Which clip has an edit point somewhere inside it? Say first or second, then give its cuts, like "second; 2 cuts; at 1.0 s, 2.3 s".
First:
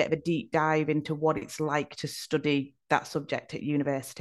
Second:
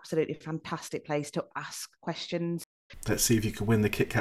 second; 1 cut; at 2.7 s